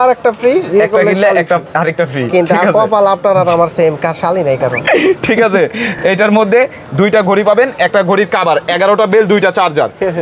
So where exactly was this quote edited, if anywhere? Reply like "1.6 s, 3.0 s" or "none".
none